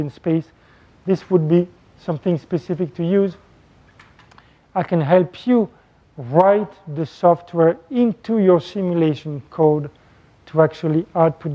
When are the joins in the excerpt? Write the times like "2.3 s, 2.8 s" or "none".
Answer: 7.8 s